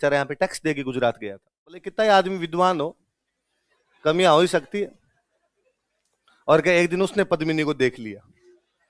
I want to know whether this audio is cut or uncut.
cut